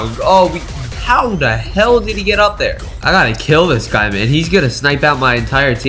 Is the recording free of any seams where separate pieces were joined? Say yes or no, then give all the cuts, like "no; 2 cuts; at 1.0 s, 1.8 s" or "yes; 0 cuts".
no; 1 cut; at 2.9 s